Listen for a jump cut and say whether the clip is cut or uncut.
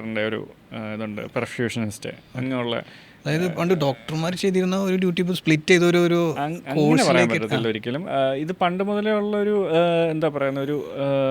uncut